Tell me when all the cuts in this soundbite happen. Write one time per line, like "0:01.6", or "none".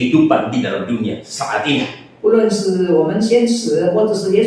none